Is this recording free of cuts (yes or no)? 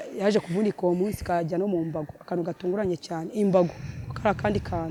yes